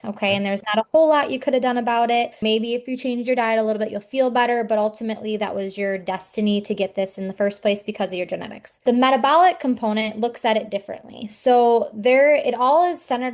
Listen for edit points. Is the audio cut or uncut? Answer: cut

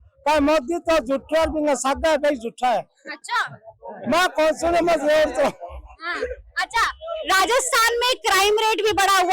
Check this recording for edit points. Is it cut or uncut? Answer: uncut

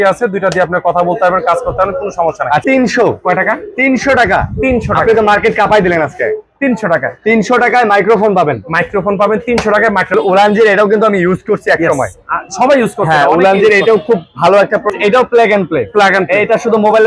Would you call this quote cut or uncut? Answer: cut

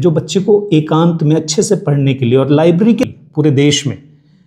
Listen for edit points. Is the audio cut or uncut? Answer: cut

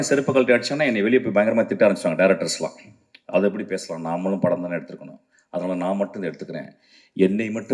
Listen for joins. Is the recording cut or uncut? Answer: uncut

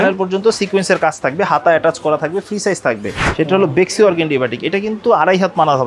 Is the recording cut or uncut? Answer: cut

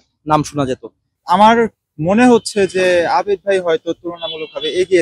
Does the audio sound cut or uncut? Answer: cut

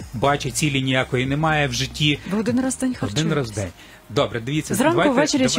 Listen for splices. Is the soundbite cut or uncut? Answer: cut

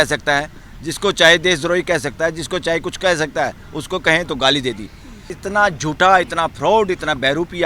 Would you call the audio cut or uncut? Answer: cut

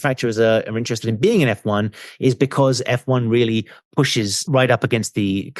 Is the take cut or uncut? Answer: cut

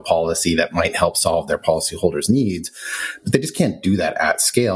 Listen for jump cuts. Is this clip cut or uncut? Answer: uncut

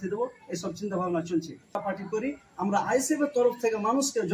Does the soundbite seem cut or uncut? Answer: cut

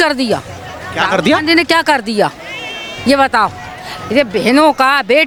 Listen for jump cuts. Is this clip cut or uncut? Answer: uncut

